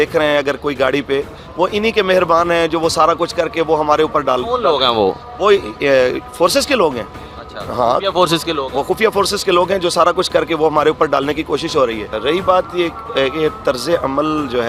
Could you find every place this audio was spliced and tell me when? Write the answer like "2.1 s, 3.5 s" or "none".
none